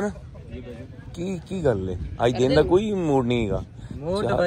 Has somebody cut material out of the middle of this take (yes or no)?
no